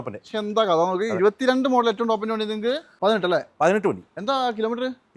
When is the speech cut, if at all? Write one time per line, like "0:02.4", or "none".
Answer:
0:02.9